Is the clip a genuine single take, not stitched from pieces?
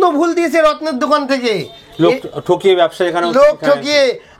yes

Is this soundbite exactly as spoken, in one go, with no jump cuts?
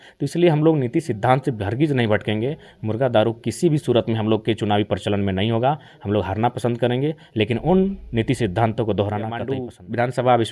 no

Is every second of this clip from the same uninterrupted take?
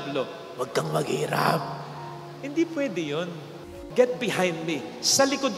no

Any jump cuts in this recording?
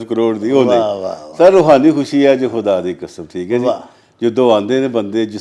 no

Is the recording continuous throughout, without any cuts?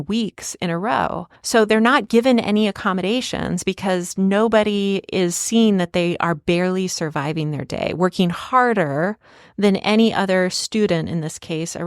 no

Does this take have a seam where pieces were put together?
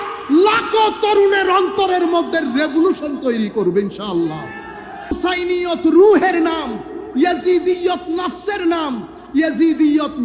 yes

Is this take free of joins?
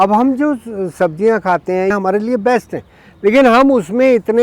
no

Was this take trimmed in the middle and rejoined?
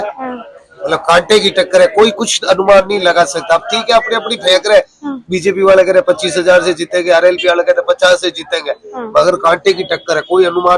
no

